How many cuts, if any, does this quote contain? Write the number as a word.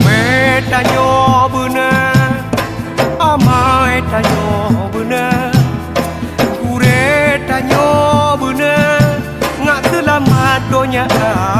zero